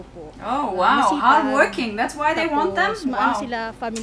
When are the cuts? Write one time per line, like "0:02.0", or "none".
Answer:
none